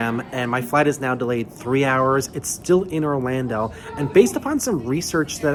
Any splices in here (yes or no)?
no